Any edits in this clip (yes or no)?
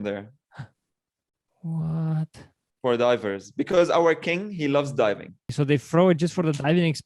yes